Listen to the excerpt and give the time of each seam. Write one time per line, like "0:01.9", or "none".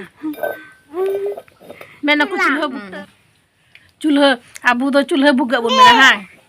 0:02.8